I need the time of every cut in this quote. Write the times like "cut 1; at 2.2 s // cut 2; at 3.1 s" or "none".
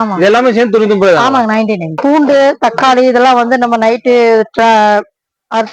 cut 1; at 1.9 s